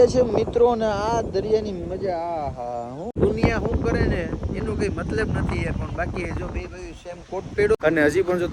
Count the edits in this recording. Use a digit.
2